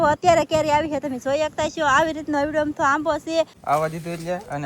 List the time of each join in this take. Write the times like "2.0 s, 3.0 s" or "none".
3.6 s